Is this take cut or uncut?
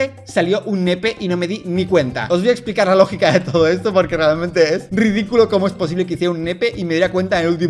uncut